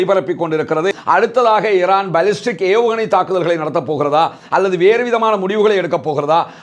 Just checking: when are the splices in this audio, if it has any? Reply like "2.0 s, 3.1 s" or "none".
1.0 s